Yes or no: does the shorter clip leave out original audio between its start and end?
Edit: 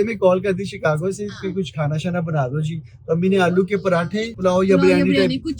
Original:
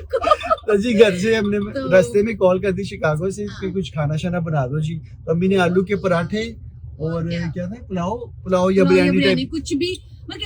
yes